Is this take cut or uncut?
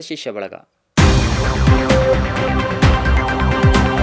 uncut